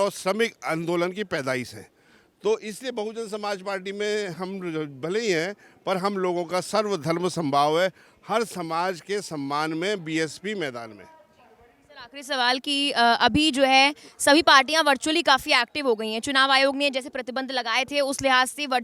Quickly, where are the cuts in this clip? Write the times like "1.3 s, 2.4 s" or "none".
none